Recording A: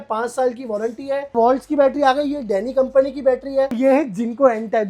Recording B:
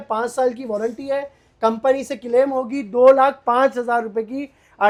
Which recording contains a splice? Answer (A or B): A